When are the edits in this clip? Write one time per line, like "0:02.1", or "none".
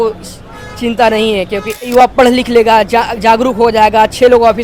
0:01.9